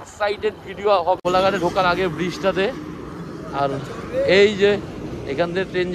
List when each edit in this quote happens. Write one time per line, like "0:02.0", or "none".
0:01.2